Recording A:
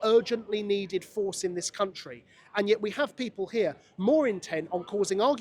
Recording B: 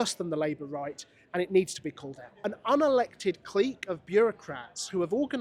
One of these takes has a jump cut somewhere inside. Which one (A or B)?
B